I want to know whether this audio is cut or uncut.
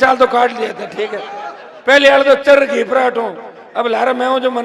uncut